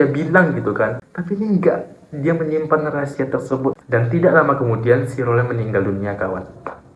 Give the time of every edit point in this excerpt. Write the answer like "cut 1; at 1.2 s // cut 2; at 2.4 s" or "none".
cut 1; at 3.8 s